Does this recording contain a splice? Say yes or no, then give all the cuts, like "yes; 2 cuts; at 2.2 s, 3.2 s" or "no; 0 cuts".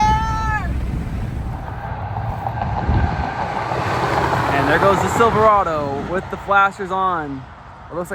yes; 1 cut; at 1.6 s